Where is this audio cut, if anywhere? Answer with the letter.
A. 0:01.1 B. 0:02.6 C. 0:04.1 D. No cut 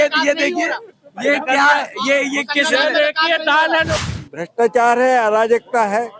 C